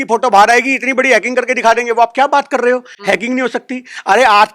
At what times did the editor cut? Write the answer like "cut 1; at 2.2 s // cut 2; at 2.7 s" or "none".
none